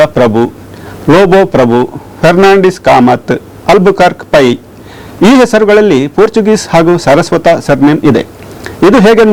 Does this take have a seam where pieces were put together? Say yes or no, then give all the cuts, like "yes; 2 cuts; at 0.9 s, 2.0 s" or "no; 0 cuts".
no; 0 cuts